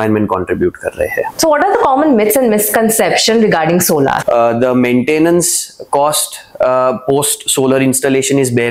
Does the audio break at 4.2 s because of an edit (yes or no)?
yes